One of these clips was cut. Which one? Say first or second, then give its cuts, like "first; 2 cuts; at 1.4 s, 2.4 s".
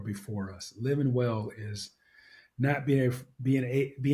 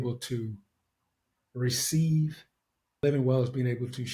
second; 1 cut; at 3.0 s